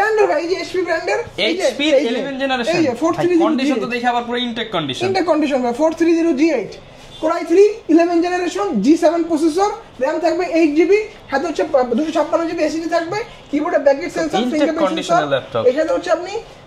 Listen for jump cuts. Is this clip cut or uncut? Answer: uncut